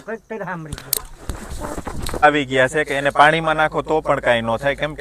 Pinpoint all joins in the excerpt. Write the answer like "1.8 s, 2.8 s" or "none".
2.2 s